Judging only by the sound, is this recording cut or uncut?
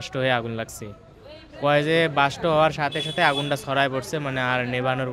uncut